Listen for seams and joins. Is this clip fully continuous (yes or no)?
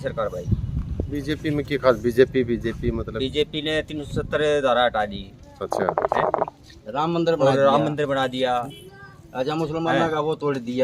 yes